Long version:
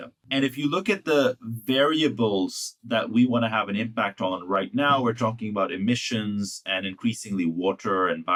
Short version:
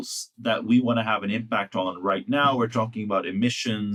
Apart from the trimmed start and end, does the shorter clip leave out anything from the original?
no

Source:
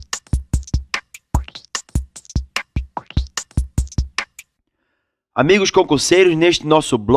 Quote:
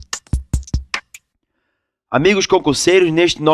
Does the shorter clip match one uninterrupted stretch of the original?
no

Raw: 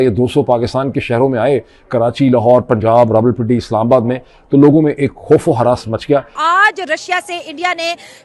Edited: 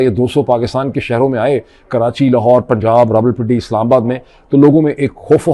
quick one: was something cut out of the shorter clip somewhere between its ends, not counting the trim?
no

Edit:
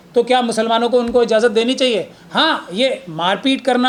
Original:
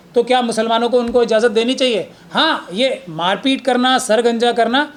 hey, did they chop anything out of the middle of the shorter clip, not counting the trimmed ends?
no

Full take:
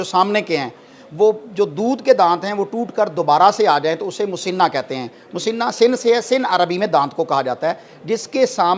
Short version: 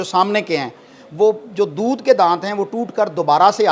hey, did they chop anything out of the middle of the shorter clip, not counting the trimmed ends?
no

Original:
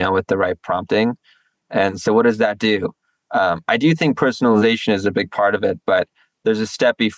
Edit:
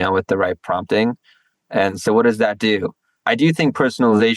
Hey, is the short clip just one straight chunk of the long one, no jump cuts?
no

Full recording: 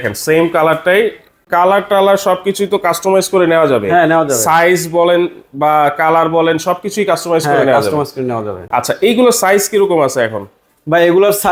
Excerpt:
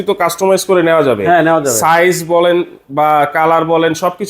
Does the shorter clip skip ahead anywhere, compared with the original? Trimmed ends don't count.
no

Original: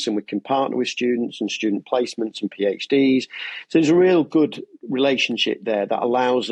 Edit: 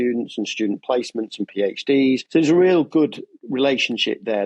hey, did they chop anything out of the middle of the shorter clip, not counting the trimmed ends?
yes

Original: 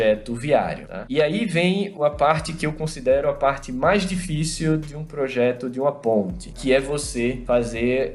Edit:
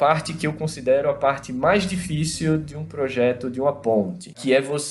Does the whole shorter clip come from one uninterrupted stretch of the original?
yes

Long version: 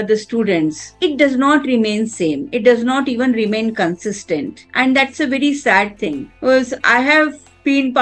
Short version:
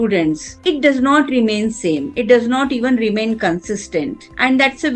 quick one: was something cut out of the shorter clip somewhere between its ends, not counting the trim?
no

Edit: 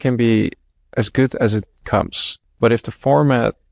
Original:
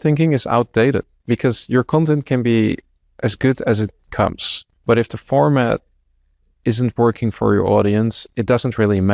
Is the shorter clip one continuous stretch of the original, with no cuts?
yes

